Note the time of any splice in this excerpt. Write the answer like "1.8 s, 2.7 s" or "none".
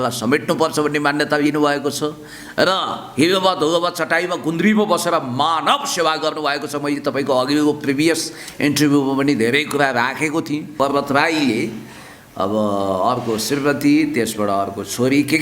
10.7 s